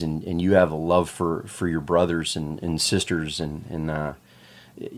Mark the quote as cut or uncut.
uncut